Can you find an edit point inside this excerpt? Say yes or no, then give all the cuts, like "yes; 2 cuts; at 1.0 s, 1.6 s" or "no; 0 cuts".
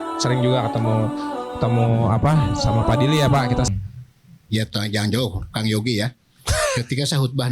yes; 1 cut; at 3.7 s